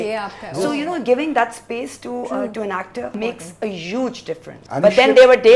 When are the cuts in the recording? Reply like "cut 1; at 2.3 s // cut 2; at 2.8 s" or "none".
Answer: cut 1; at 3.2 s // cut 2; at 4.5 s

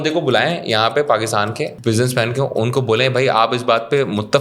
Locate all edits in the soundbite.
cut 1; at 1.7 s

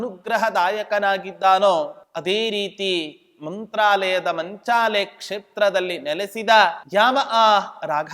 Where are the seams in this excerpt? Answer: cut 1; at 2.0 s // cut 2; at 6.8 s

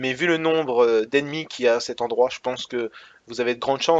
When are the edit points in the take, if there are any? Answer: none

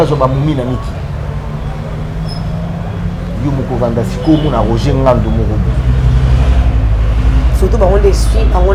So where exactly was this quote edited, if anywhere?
none

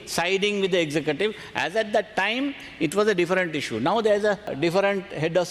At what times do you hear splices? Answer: cut 1; at 4.5 s

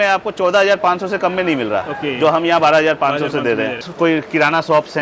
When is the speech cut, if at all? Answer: cut 1; at 3.9 s

